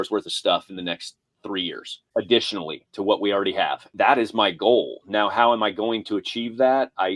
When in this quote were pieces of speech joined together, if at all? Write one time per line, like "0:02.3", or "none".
0:01.9
0:03.9